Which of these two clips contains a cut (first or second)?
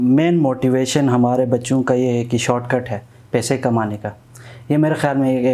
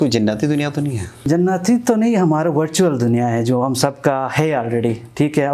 second